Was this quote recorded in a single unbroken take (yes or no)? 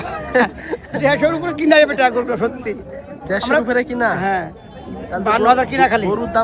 yes